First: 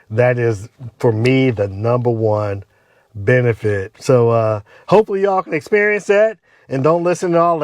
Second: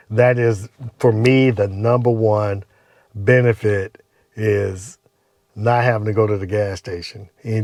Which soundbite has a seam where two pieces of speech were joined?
first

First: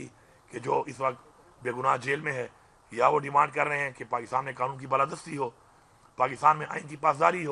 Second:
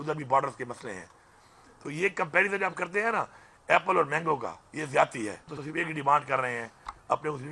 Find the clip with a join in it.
second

